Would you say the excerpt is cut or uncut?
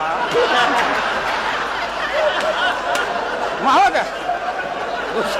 uncut